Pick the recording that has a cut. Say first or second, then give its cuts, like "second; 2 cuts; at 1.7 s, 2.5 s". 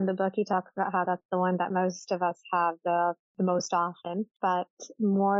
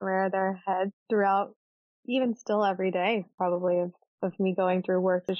first; 1 cut; at 4.3 s